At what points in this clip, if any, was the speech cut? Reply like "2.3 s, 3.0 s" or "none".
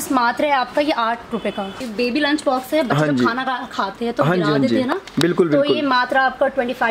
1.7 s